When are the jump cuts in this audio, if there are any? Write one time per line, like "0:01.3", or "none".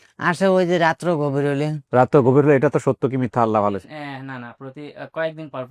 none